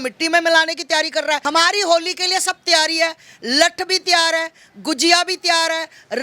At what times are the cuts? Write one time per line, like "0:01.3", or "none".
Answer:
0:01.4